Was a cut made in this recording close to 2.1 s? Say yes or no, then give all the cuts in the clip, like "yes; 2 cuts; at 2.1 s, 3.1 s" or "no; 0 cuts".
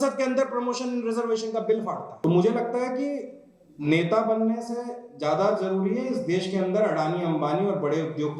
yes; 1 cut; at 2.1 s